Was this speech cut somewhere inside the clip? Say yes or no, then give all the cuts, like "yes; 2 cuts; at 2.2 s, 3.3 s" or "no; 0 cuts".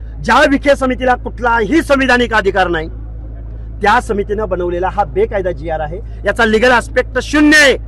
no; 0 cuts